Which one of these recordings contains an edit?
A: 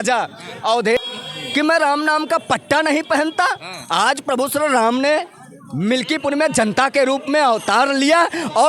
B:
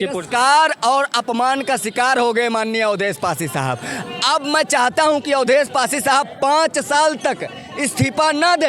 A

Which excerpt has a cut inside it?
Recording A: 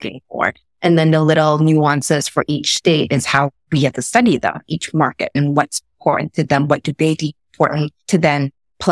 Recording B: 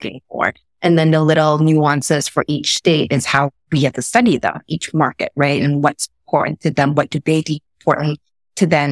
A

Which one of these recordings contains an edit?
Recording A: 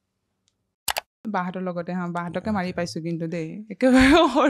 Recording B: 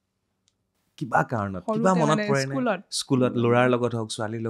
A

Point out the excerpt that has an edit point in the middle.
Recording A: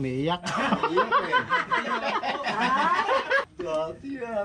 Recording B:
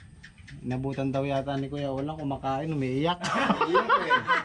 A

